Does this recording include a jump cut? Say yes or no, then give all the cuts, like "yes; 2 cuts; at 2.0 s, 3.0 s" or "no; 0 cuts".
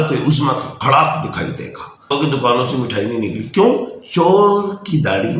yes; 1 cut; at 2.1 s